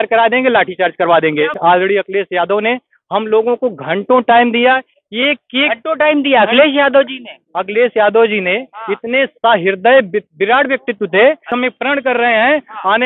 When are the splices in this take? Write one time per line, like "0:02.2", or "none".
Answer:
0:01.5
0:11.5